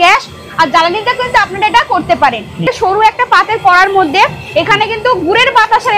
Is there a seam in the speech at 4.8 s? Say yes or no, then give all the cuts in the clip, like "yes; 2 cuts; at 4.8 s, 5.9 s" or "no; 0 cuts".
no; 1 cut; at 2.6 s